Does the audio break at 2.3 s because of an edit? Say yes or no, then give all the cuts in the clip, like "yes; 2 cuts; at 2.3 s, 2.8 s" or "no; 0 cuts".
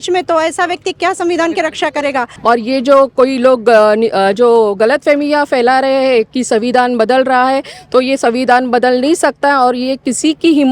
yes; 1 cut; at 2.3 s